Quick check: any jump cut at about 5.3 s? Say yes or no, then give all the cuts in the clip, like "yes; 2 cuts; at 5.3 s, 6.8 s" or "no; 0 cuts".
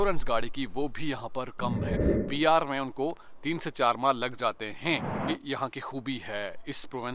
yes; 2 cuts; at 2.1 s, 5.3 s